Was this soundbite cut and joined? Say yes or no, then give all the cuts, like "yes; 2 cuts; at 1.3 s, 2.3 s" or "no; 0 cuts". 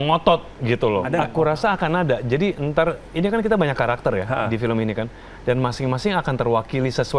yes; 1 cut; at 1.1 s